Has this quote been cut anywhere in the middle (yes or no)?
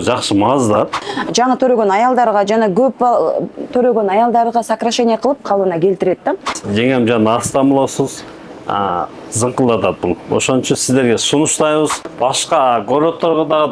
yes